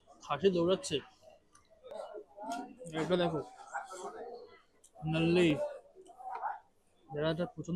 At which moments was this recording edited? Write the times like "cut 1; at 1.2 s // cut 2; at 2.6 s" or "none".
none